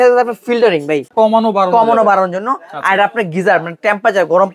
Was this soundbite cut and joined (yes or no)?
yes